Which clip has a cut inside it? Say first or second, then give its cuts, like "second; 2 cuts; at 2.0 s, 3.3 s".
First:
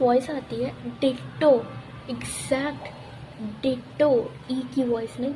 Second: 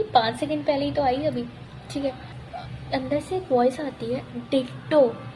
second; 1 cut; at 2.3 s